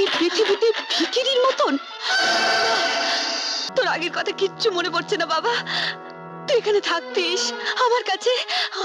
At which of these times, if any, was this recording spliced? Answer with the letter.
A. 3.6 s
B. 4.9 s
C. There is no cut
A